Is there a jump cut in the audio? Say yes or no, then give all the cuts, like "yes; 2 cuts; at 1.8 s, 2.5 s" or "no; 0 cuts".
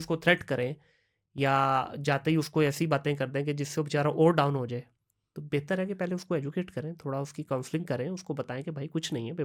no; 0 cuts